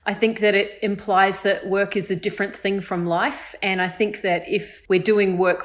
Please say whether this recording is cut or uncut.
cut